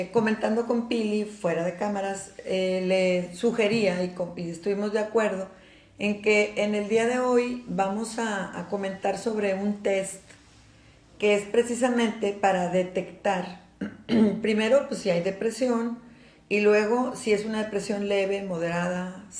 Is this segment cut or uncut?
uncut